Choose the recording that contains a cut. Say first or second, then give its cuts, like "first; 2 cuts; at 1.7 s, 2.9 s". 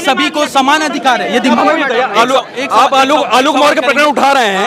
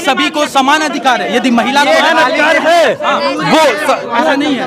first; 1 cut; at 1.6 s